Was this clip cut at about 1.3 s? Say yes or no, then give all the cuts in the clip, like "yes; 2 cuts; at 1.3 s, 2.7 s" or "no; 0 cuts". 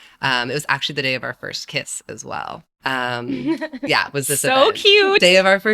no; 1 cut; at 2.7 s